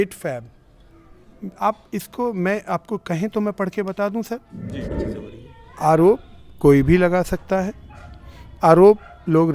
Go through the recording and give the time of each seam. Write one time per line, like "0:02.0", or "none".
0:04.9